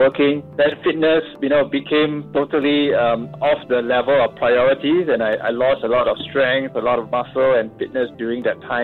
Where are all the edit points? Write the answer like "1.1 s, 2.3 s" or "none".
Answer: none